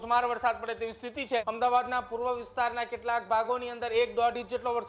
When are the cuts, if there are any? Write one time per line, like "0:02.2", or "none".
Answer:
0:01.5